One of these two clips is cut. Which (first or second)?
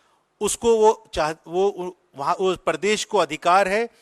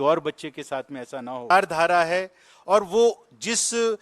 second